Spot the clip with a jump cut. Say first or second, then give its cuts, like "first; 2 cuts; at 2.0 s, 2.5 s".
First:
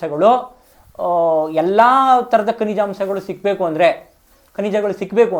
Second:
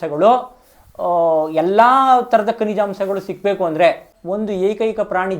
second; 1 cut; at 4.2 s